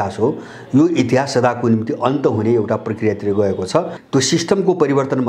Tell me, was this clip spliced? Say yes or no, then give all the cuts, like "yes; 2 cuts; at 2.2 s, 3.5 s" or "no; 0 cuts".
yes; 1 cut; at 4.0 s